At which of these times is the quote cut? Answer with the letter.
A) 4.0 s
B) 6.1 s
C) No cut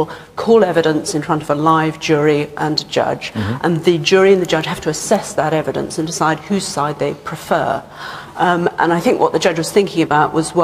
C